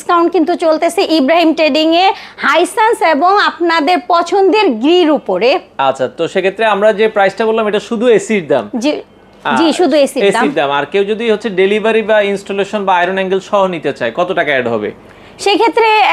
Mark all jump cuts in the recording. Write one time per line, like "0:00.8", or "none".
none